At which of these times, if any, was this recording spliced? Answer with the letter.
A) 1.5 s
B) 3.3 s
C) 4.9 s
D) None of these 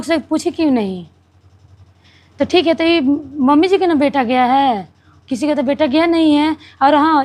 D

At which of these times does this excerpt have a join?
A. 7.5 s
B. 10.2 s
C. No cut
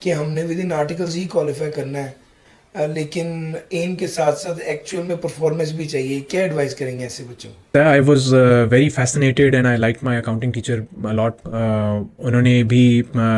A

